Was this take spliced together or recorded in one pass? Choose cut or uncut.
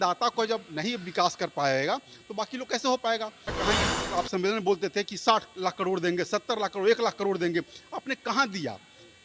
cut